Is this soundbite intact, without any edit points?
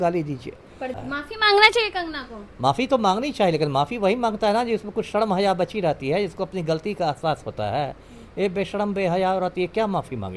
no; 1 cut; at 1.0 s

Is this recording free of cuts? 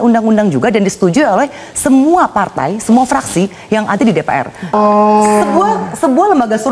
no; 1 cut; at 4.7 s

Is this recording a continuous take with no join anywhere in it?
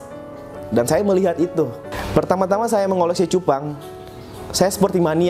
yes; 0 cuts

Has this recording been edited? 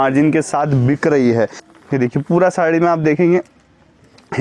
yes; 1 cut; at 1.7 s

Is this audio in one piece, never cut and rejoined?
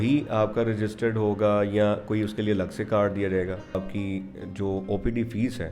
no; 1 cut; at 3.8 s

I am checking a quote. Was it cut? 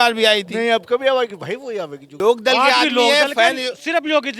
yes; 1 cut; at 2.0 s

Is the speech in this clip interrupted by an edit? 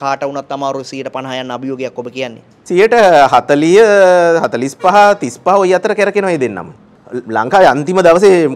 yes; 1 cut; at 6.8 s

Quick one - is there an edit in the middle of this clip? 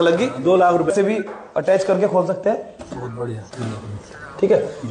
yes; 1 cut; at 0.9 s

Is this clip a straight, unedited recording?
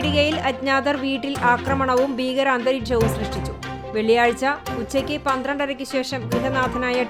yes; 0 cuts

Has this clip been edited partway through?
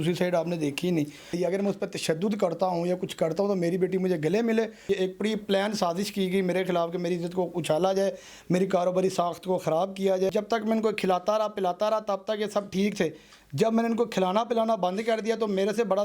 yes; 3 cuts; at 1.3 s, 4.8 s, 10.3 s

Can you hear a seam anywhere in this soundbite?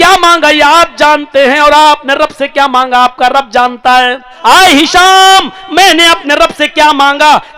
yes; 1 cut; at 4.3 s

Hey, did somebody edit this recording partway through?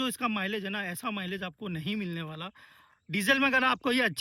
no; 0 cuts

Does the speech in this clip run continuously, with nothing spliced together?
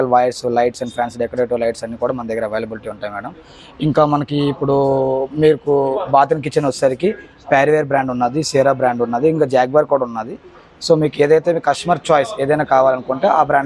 yes; 0 cuts

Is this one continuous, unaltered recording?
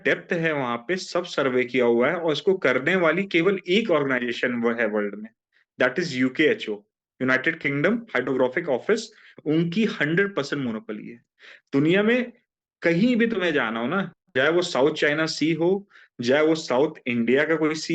yes; 0 cuts

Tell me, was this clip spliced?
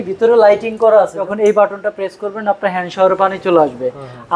yes; 1 cut; at 1.3 s

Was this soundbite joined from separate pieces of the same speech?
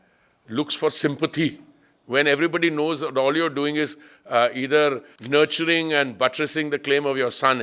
yes; 1 cut; at 5.1 s

